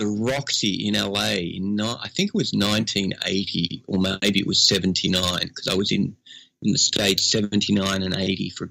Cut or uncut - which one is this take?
uncut